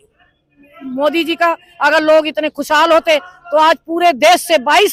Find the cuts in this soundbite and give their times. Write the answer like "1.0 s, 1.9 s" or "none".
none